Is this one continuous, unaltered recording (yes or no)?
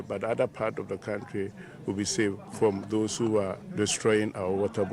no